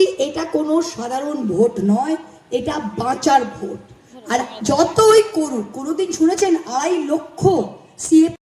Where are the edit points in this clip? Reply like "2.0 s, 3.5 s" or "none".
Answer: none